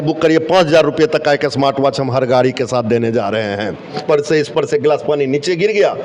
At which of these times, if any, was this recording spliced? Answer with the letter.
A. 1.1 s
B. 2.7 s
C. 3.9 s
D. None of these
C